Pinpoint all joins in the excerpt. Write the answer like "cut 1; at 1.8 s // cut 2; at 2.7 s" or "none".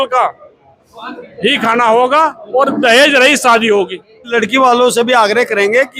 cut 1; at 4.3 s